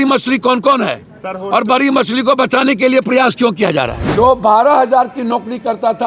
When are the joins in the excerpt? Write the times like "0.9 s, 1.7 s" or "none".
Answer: 4.0 s